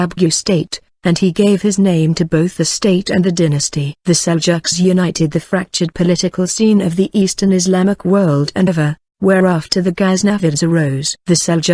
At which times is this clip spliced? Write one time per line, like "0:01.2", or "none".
none